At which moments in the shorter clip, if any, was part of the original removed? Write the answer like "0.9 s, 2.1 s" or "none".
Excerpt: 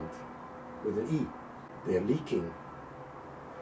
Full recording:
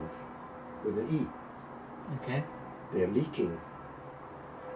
1.6 s

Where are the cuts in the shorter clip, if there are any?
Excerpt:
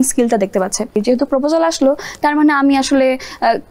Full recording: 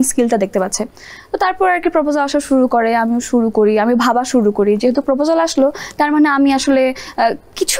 1.0 s

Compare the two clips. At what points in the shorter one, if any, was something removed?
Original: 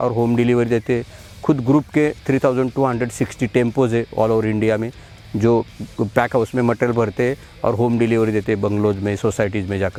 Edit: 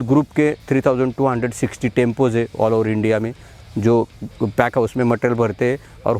none

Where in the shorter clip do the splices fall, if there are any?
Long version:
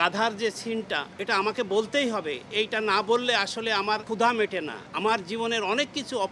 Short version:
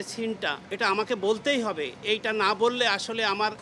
none

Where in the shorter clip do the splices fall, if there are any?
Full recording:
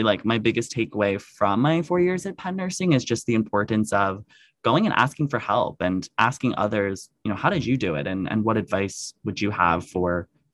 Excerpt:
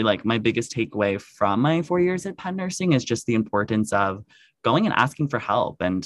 none

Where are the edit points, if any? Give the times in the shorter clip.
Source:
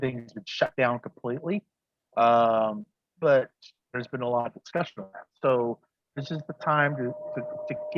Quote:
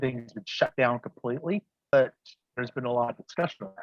1.9 s

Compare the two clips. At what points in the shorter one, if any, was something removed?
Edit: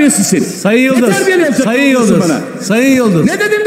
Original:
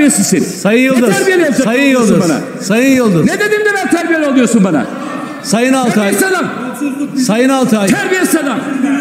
none

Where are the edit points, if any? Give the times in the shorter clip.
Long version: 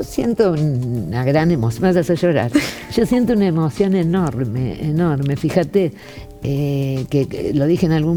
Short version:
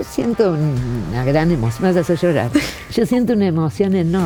none

